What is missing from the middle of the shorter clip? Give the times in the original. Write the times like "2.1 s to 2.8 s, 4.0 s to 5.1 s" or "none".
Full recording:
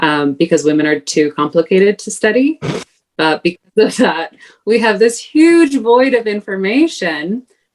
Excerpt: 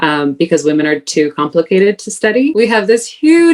2.5 s to 4.6 s